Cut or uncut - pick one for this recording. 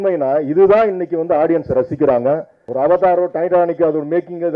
cut